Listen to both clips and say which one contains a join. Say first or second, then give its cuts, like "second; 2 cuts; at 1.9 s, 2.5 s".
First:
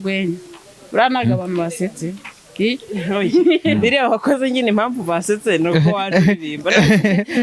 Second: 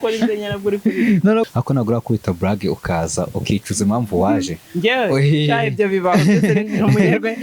second; 1 cut; at 1.5 s